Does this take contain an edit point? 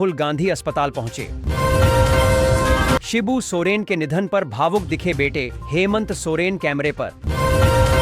yes; 3 cuts; at 1.4 s, 3.1 s, 7.2 s

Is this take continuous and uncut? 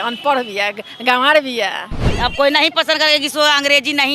no; 1 cut; at 2.0 s

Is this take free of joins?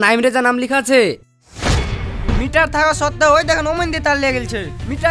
no; 1 cut; at 2.3 s

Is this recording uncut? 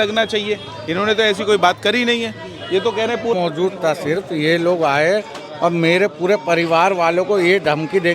no; 1 cut; at 3.3 s

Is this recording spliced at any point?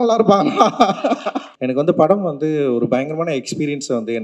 yes; 1 cut; at 1.4 s

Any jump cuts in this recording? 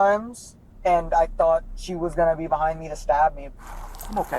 yes; 1 cut; at 3.4 s

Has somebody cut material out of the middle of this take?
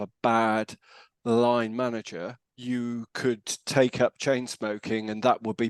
no; 0 cuts

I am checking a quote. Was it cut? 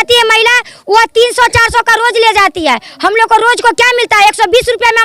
no; 0 cuts

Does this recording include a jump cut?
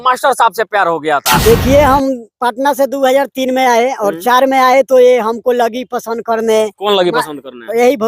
yes; 1 cut; at 1.4 s

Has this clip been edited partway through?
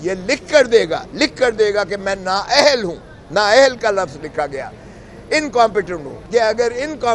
yes; 1 cut; at 6.2 s

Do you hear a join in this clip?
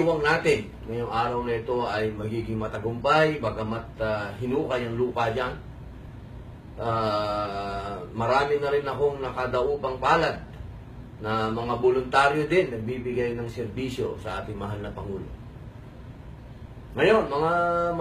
yes; 1 cut; at 13.6 s

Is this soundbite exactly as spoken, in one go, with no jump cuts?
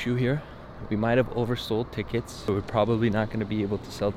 no; 1 cut; at 2.5 s

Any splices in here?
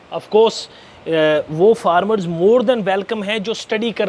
no; 0 cuts

